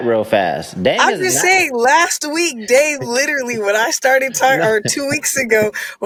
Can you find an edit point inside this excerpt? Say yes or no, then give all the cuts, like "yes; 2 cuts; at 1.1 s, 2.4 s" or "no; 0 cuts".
no; 0 cuts